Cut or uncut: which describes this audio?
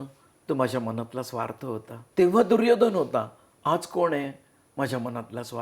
cut